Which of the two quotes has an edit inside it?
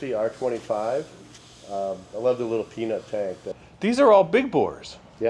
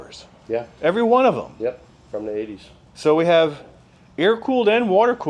first; 1 cut; at 3.6 s

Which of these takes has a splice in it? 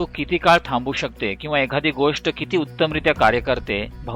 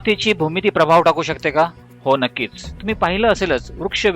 second; 2 cuts; at 1.9 s, 2.7 s

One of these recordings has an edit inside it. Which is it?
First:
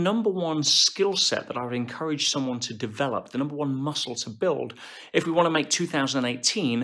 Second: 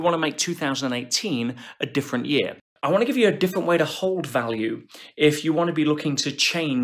second; 1 cut; at 2.7 s

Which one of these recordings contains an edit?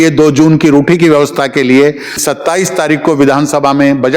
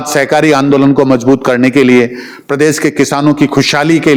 first; 1 cut; at 2.1 s

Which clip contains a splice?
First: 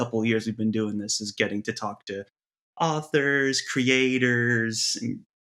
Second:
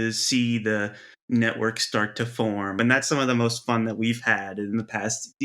second; 1 cut; at 2.8 s

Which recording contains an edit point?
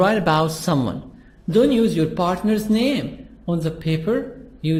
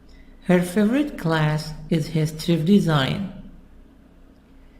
second; 1 cut; at 1.2 s

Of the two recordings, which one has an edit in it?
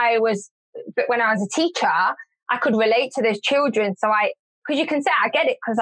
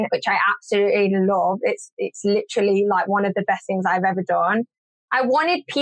second; 1 cut; at 4.8 s

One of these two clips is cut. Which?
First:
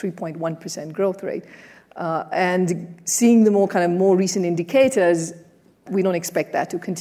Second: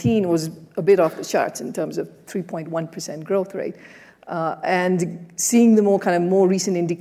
first; 1 cut; at 5.8 s

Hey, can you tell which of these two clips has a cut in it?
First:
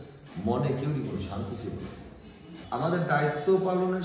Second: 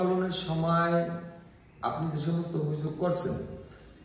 first; 1 cut; at 2.5 s

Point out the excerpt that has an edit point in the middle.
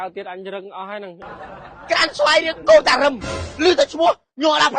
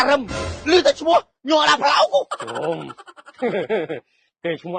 first; 1 cut; at 1.3 s

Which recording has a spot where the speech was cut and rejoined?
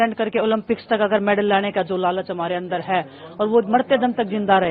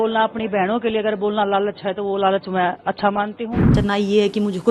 second; 1 cut; at 3.7 s

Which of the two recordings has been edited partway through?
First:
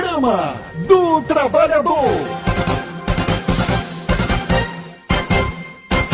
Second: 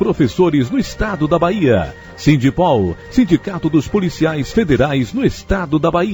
first; 1 cut; at 2.3 s

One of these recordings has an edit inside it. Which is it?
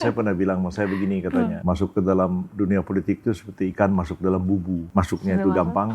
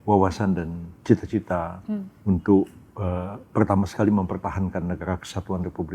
first; 2 cuts; at 1.6 s, 4.9 s

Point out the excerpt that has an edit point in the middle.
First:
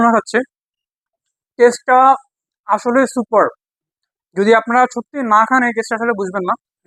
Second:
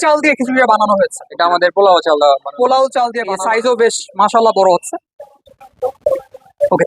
second; 1 cut; at 3.2 s

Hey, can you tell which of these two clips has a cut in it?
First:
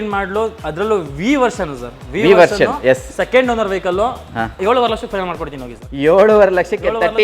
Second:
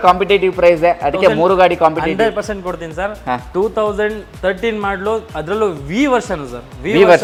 first; 1 cut; at 4.6 s

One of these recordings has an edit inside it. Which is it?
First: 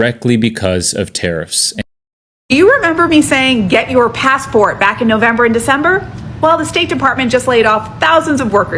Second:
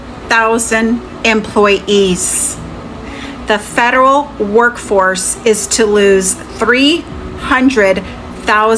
first; 1 cut; at 1.8 s

